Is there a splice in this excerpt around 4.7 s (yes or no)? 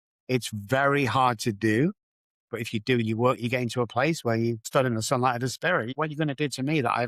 yes